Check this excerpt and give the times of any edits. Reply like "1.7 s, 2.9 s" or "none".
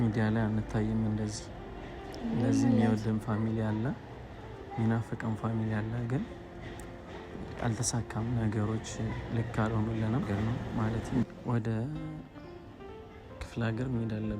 10.3 s

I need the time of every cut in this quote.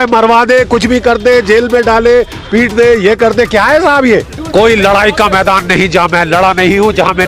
4.4 s

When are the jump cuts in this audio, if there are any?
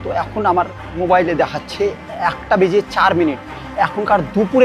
0.9 s

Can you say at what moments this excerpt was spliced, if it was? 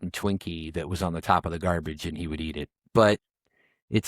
2.8 s

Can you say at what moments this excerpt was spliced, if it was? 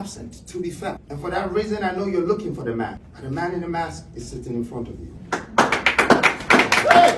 1.1 s, 3.1 s, 5.1 s

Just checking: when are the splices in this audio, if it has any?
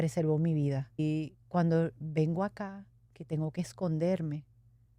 1.0 s

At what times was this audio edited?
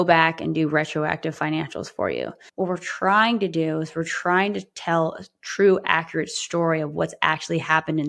2.4 s

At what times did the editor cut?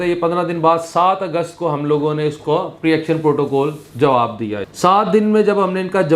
4.7 s

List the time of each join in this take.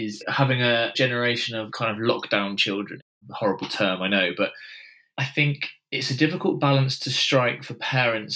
1.1 s, 3.1 s

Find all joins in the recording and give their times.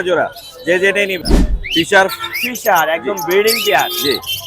1.2 s

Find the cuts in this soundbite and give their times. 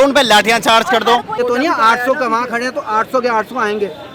1.4 s

